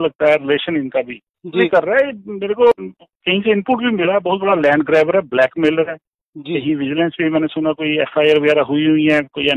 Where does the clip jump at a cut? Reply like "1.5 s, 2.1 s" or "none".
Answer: 1.7 s, 2.7 s